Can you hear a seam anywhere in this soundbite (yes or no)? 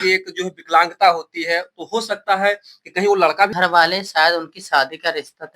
yes